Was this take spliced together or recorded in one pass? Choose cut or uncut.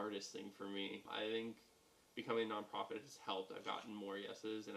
cut